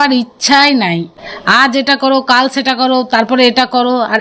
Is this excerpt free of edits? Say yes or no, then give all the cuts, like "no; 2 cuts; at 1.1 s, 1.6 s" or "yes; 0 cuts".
no; 1 cut; at 1.1 s